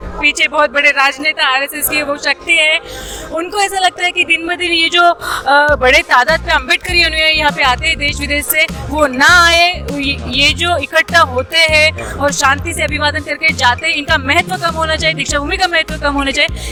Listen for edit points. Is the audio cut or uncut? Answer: uncut